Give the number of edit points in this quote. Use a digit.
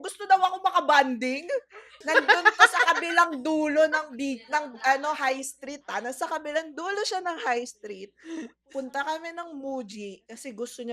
1